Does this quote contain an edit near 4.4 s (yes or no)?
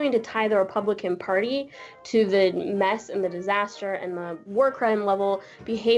yes